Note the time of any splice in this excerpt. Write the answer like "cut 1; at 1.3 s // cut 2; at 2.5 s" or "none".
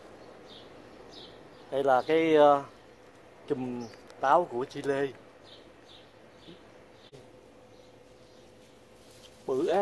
cut 1; at 7.1 s